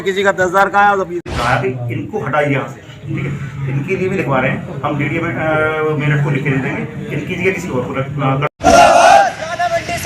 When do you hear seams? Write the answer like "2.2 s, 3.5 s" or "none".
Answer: 1.3 s, 8.6 s